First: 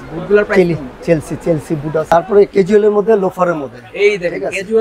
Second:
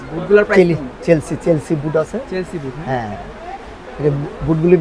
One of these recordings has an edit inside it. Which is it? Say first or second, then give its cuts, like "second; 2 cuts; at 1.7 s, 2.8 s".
first; 1 cut; at 2.1 s